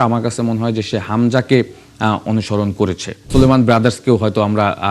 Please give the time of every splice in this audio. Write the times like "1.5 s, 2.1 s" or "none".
3.2 s